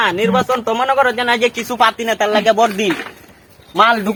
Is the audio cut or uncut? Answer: uncut